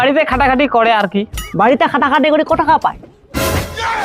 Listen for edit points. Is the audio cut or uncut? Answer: cut